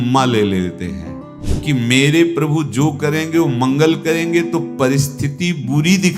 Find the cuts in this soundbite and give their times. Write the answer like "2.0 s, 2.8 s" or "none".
1.4 s